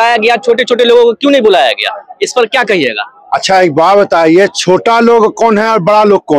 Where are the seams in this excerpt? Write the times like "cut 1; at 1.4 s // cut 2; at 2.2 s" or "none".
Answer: none